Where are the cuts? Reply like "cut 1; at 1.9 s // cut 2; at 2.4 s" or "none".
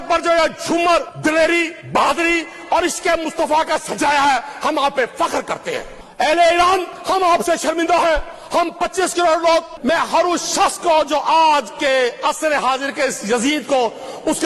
cut 1; at 1.1 s // cut 2; at 1.8 s // cut 3; at 6.0 s // cut 4; at 6.9 s // cut 5; at 8.4 s // cut 6; at 9.7 s